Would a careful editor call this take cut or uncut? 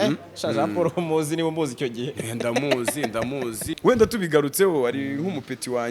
cut